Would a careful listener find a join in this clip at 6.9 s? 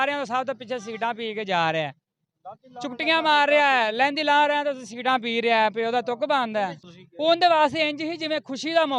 yes; 1 cut; at 6.9 s

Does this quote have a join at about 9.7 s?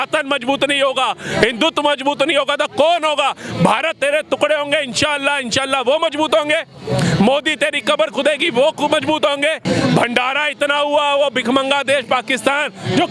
yes; 1 cut; at 9.7 s

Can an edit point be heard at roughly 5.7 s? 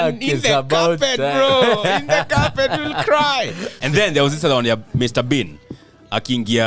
no; 1 cut; at 3.8 s

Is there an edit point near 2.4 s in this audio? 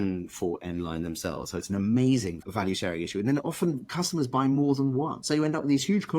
yes; 2 cuts; at 2.4 s, 5.2 s

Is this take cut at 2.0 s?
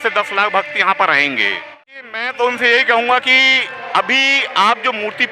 yes; 1 cut; at 2.0 s

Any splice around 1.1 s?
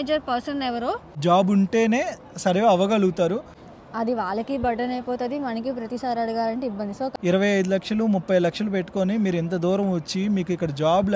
yes; 3 cuts; at 1.1 s, 3.5 s, 7.1 s

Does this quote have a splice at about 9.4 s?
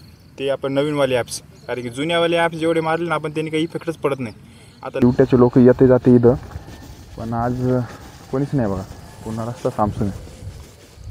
no; 1 cut; at 5.0 s

